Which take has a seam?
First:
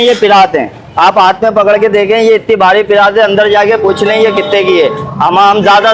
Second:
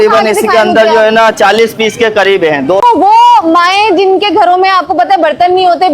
second; 1 cut; at 2.8 s

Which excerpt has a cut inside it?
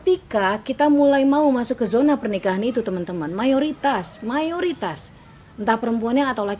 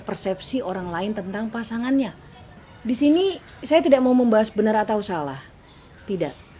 second; 1 cut; at 2.7 s

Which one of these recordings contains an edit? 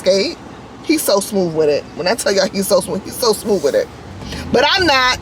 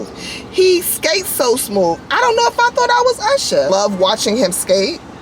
second; 1 cut; at 3.7 s

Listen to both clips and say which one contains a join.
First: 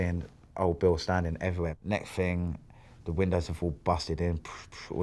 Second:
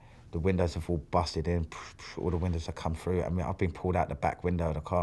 first; 1 cut; at 1.8 s

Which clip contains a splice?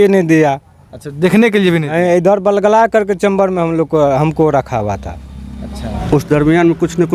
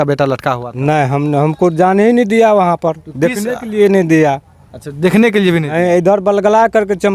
first; 1 cut; at 5.9 s

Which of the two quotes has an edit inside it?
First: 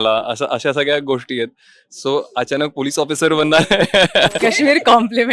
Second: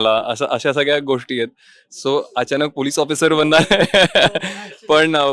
first; 1 cut; at 4.4 s

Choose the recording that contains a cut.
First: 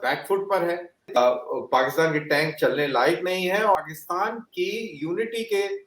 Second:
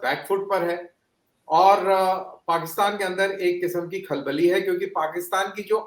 first; 2 cuts; at 1.2 s, 3.8 s

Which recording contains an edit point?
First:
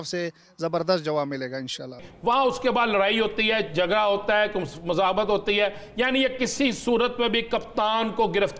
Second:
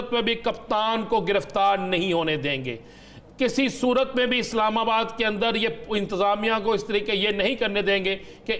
first; 1 cut; at 2.1 s

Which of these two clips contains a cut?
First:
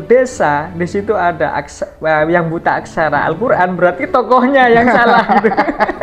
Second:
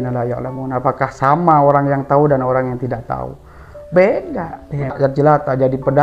second; 1 cut; at 4.9 s

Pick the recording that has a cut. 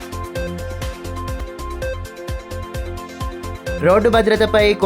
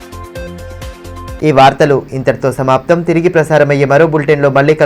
first; 1 cut; at 1.0 s

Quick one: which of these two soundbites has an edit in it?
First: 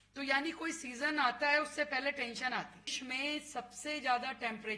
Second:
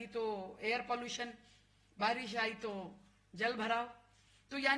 first; 1 cut; at 3.0 s

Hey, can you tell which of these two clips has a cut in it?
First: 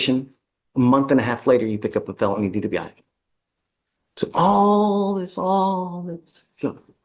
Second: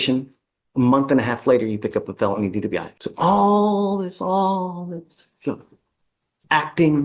second; 1 cut; at 3.0 s

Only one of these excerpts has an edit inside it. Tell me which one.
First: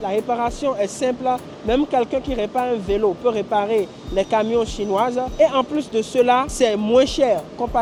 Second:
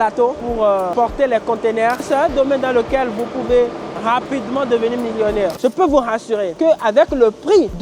second; 2 cuts; at 2.0 s, 5.6 s

